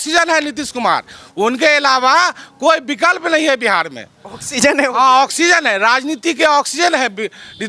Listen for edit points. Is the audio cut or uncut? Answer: uncut